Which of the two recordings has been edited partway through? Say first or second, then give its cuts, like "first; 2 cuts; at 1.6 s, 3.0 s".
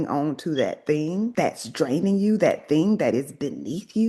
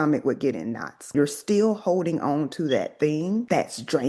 second; 1 cut; at 1.1 s